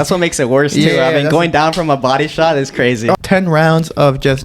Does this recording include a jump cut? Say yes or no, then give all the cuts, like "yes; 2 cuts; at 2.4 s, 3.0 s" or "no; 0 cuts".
yes; 1 cut; at 3.1 s